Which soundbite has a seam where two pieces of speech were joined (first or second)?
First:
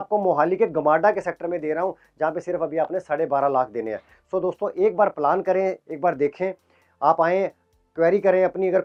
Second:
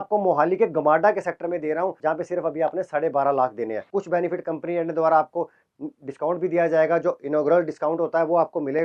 second